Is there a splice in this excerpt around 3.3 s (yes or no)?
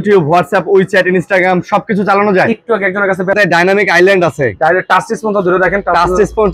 yes